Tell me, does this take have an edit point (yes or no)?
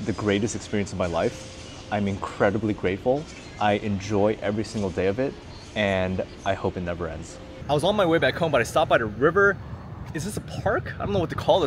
no